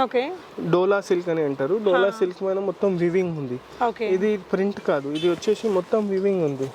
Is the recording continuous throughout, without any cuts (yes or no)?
yes